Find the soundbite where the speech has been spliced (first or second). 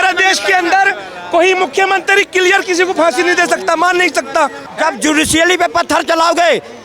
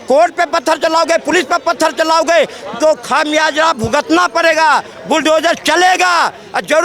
first